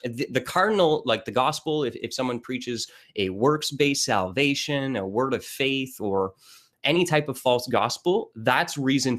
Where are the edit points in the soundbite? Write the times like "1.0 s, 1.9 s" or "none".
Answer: none